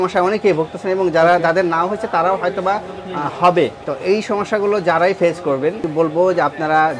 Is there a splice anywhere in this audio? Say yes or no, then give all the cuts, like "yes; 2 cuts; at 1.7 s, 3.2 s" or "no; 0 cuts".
yes; 2 cuts; at 3.9 s, 5.9 s